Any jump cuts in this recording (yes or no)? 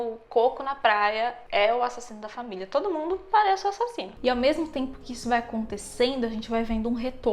no